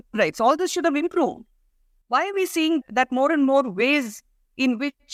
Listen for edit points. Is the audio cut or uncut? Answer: uncut